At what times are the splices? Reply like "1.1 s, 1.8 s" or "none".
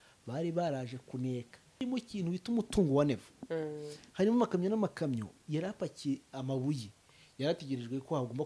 1.8 s